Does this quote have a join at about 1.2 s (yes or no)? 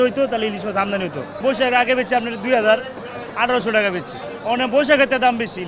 no